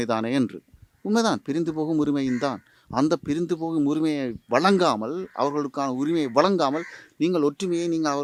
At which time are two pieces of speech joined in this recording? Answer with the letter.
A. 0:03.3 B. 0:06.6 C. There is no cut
C